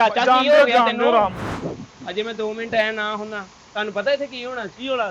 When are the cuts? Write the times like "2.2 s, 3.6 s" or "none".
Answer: 1.5 s

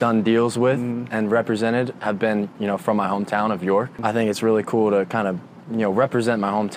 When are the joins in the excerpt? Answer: 3.9 s

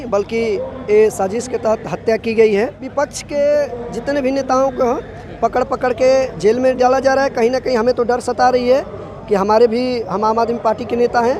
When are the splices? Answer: 2.9 s

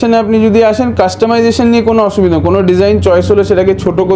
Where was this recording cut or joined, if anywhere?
none

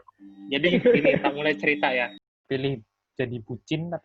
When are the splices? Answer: 2.2 s

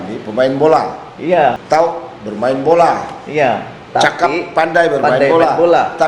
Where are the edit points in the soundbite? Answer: 1.6 s

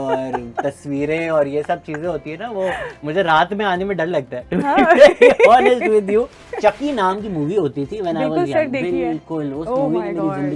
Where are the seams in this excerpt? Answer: 6.5 s

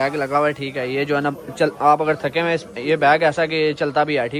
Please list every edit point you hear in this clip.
none

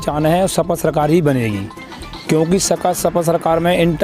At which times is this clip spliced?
none

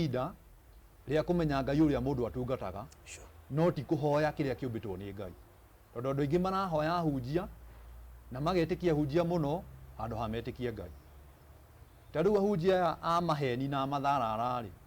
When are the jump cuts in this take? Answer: none

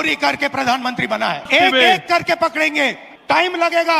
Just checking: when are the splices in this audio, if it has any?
1.4 s, 3.0 s

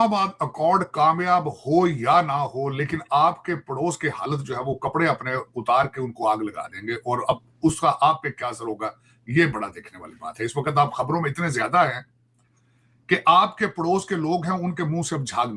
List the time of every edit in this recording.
none

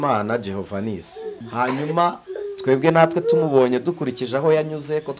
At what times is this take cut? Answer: 1.4 s

